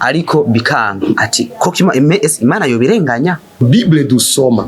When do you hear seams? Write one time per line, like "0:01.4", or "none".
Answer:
0:03.6